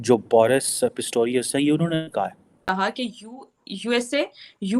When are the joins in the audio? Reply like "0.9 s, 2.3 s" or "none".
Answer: 2.5 s

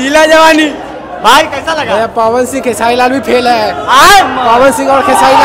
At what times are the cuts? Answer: none

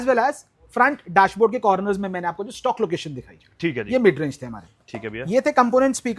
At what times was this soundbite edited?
none

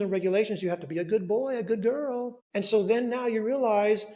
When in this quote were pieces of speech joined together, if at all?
2.4 s

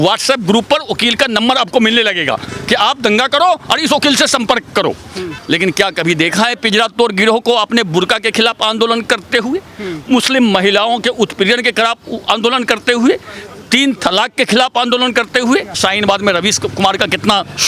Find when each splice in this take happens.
5.3 s, 15.8 s

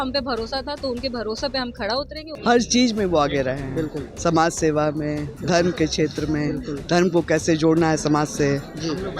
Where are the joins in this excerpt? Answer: 2.2 s

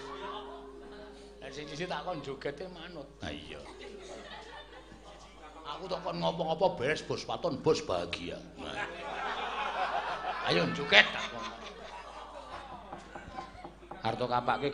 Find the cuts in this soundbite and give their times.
12.6 s

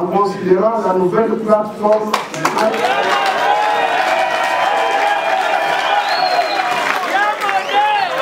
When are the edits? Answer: none

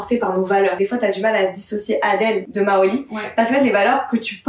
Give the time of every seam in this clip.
0.8 s, 2.5 s

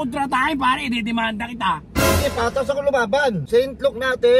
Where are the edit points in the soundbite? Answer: 3.4 s

